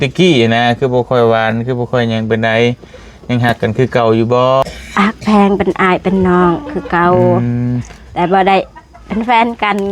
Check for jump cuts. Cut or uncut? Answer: cut